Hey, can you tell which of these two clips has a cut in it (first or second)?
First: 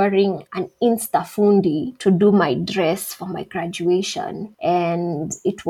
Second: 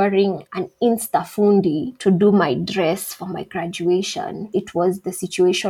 second